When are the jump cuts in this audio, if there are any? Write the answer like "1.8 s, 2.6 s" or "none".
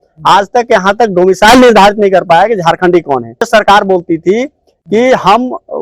3.5 s